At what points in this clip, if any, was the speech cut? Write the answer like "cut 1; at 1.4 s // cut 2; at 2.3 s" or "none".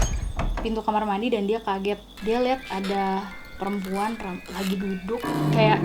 cut 1; at 2.1 s